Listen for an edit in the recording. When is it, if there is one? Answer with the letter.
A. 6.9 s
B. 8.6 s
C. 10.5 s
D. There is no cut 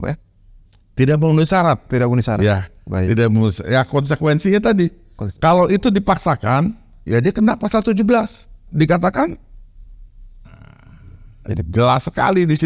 A